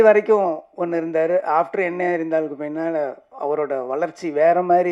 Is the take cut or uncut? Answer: uncut